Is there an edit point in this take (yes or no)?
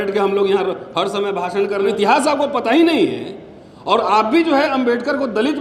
yes